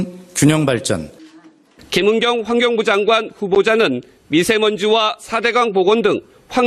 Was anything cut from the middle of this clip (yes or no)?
yes